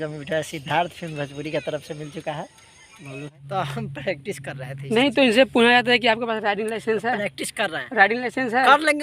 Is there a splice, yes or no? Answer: yes